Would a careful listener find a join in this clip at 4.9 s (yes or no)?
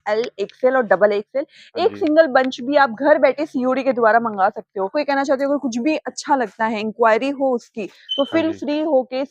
yes